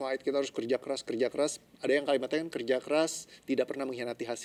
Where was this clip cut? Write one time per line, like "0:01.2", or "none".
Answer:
none